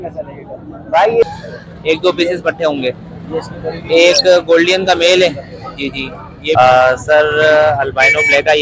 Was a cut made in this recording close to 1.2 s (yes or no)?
yes